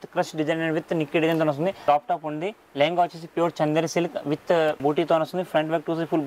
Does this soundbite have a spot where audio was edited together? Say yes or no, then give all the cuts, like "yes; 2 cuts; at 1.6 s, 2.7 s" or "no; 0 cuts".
yes; 2 cuts; at 1.8 s, 4.8 s